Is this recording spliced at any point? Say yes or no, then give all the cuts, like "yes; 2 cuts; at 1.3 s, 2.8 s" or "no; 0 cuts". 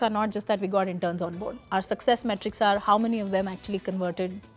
no; 0 cuts